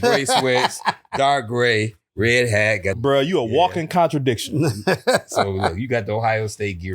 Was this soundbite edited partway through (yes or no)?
yes